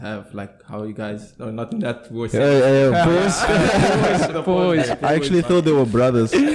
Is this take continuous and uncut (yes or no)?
yes